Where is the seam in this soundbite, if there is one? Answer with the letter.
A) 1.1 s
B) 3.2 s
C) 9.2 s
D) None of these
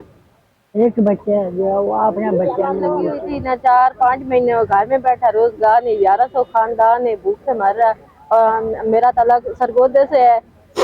B